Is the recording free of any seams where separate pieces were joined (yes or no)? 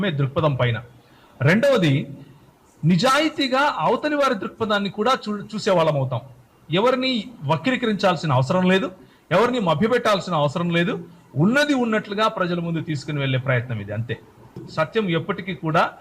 no